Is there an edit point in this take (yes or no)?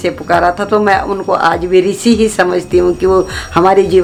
no